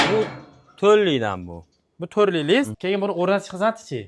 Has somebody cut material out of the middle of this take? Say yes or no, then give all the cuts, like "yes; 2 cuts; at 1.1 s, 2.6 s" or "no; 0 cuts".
yes; 1 cut; at 2.8 s